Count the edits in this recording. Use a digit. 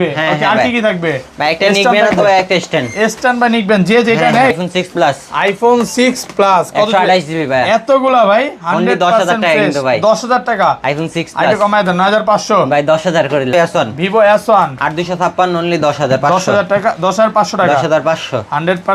2